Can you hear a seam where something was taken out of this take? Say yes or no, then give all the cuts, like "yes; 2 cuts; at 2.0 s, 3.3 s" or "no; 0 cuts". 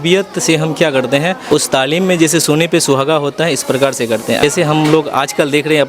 yes; 2 cuts; at 1.4 s, 4.4 s